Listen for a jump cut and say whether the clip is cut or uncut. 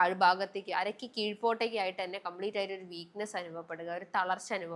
uncut